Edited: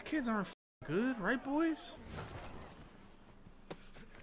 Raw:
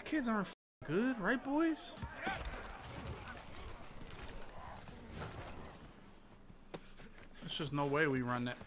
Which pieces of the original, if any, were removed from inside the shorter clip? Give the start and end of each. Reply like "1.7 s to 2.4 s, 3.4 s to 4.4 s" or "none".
1.9 s to 5.0 s